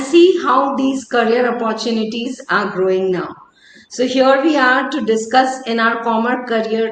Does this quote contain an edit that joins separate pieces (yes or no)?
no